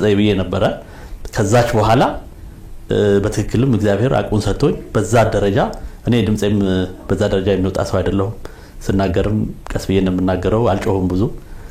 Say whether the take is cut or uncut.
uncut